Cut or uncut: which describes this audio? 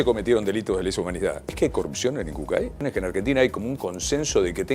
cut